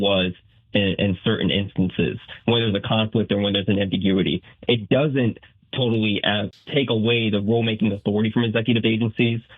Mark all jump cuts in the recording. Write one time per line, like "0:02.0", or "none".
0:06.5